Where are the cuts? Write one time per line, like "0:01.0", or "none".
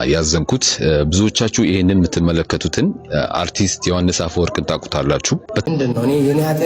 0:05.6